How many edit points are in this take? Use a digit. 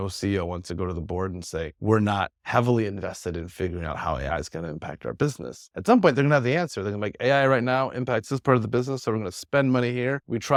0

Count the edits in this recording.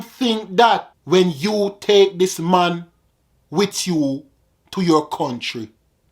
1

